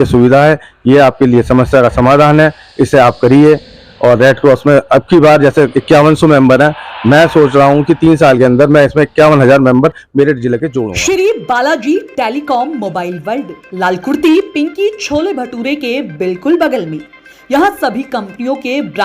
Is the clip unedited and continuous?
no; 1 cut; at 10.8 s

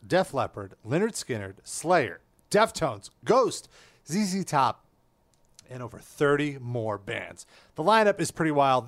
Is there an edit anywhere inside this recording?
no; 0 cuts

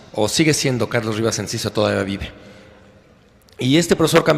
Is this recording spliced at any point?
yes; 1 cut; at 1.5 s

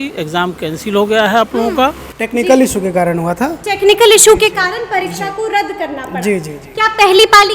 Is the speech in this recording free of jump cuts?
no; 1 cut; at 2.2 s

